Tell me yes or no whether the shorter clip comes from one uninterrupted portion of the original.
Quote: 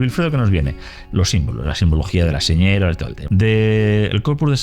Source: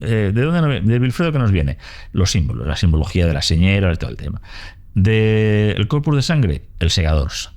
no